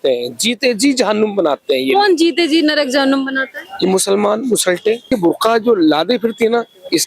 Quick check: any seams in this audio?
yes; 1 cut; at 5.0 s

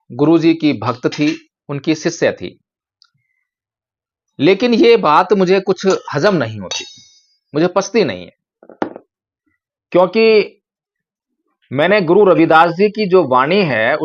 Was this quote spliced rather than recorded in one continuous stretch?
no; 0 cuts

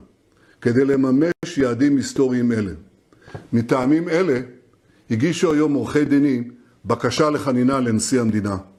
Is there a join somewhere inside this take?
no; 0 cuts

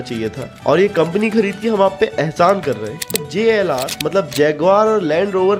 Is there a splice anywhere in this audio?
yes; 1 cut; at 3.2 s

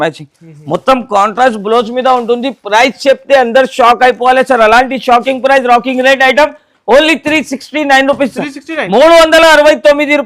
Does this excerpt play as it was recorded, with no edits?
yes; 0 cuts

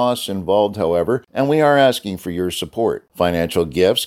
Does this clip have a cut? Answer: yes; 1 cut; at 1.3 s

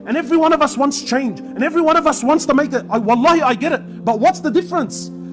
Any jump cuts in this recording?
no; 0 cuts

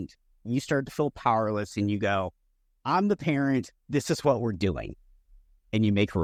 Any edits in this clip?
no; 0 cuts

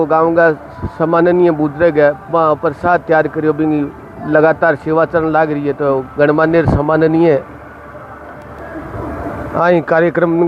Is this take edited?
no; 0 cuts

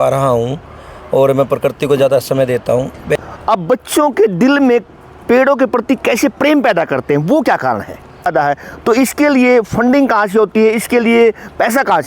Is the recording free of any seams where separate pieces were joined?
no; 2 cuts; at 3.1 s, 8.3 s

